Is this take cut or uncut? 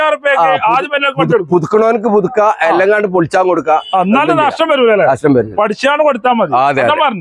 uncut